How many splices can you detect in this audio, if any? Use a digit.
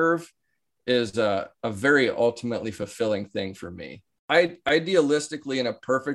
1